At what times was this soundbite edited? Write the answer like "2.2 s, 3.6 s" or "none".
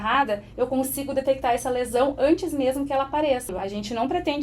3.5 s